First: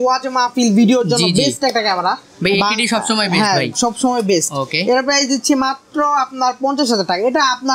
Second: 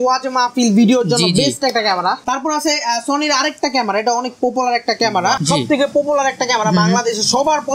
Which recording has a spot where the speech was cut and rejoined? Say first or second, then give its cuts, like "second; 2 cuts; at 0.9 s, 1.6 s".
second; 2 cuts; at 2.2 s, 5.4 s